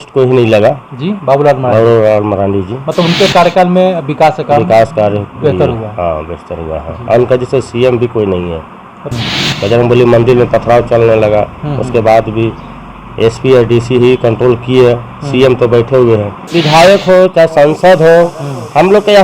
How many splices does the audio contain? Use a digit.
2